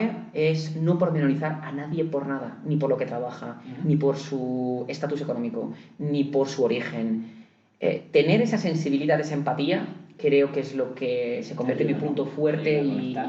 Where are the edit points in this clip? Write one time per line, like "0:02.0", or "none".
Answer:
none